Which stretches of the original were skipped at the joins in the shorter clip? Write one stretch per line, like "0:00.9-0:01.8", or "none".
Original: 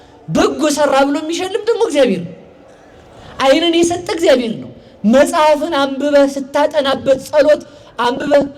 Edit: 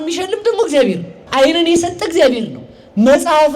0:02.4-0:03.2